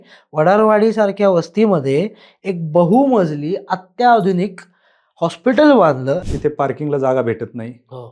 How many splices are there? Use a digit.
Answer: 1